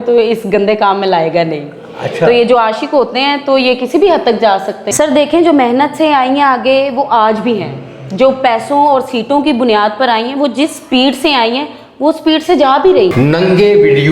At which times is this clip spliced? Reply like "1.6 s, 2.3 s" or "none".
4.9 s, 13.1 s